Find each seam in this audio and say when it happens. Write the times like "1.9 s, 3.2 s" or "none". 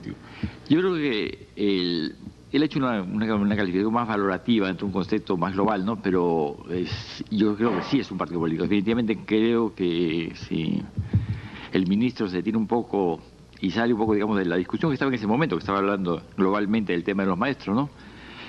8.9 s